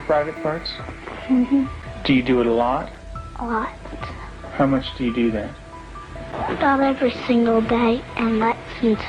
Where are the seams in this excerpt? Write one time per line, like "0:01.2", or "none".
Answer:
0:01.9
0:06.3